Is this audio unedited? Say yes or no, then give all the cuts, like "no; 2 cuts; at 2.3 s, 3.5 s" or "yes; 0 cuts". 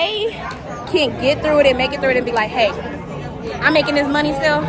yes; 0 cuts